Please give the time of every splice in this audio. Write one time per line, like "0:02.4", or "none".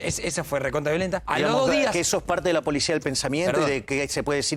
0:01.2